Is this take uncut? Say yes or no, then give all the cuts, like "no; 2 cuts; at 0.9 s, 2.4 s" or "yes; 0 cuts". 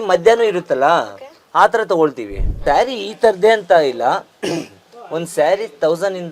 no; 1 cut; at 2.6 s